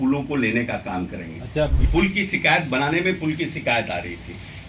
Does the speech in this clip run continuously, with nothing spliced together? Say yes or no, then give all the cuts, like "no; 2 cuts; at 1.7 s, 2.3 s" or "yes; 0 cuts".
no; 1 cut; at 1.8 s